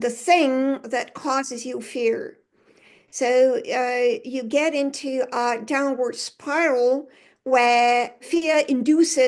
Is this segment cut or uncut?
cut